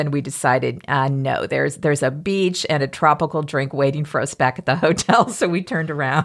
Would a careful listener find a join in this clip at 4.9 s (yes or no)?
no